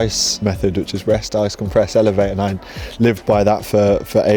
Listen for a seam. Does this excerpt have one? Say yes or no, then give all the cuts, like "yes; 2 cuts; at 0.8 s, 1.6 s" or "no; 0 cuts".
no; 0 cuts